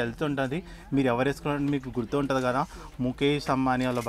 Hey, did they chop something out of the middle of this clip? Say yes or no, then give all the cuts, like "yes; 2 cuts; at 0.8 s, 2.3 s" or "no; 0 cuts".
no; 0 cuts